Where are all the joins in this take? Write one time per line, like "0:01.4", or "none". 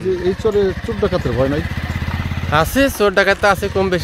none

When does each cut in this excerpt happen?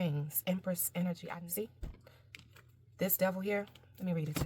0:01.3

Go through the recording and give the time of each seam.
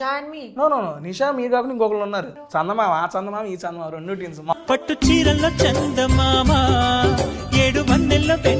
0:02.4
0:04.5

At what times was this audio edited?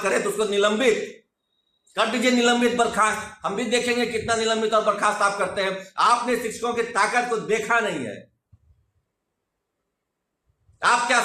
none

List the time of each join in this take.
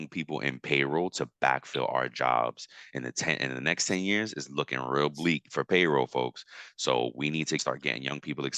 0:07.6

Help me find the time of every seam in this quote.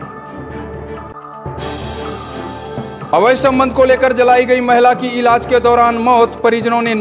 0:03.0

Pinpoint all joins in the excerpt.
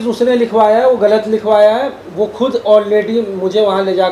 none

